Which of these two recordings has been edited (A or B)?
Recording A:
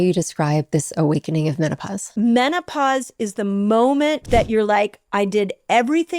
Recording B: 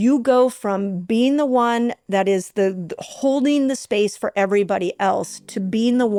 A